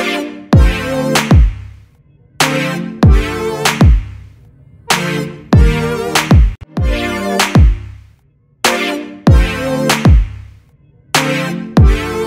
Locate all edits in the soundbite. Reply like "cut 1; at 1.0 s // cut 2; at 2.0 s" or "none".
cut 1; at 6.5 s